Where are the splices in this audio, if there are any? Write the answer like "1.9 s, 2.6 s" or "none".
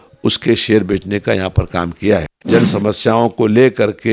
2.3 s

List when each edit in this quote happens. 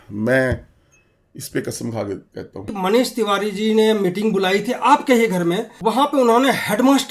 2.8 s, 6.0 s

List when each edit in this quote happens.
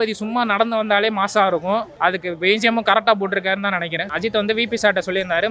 1.9 s, 4.0 s

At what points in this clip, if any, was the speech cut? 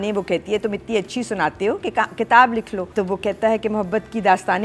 2.9 s

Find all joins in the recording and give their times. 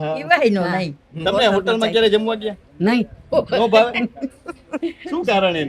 1.0 s

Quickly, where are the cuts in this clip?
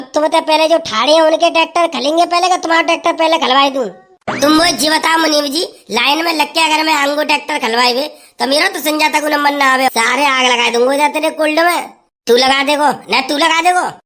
9.9 s

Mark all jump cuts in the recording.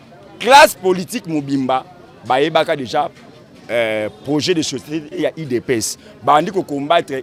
none

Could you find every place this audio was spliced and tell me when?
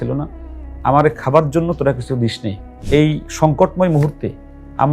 2.7 s

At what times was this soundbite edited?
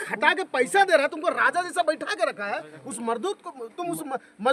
none

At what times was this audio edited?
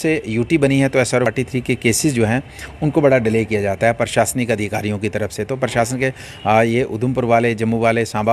1.3 s

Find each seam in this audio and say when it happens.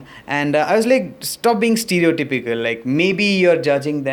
none

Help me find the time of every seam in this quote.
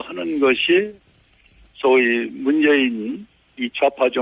2.5 s

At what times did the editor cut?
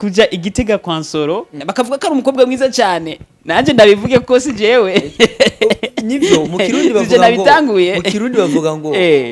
1.6 s

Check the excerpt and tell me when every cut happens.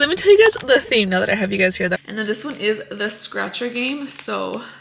2.0 s

